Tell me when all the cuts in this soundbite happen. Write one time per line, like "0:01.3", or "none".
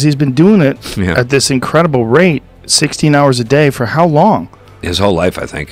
none